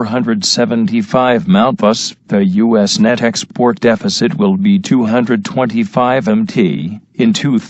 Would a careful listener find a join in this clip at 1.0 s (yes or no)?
yes